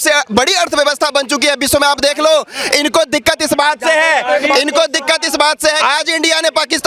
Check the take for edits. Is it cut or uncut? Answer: cut